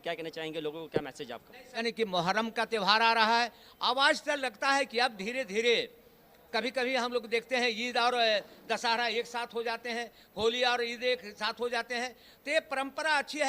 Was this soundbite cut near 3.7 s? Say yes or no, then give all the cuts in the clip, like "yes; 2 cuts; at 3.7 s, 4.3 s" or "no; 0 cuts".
no; 1 cut; at 1.6 s